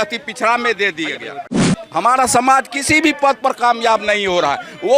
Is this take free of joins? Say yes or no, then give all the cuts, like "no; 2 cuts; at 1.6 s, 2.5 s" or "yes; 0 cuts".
no; 1 cut; at 1.8 s